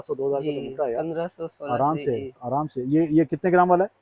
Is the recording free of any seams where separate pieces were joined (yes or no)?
yes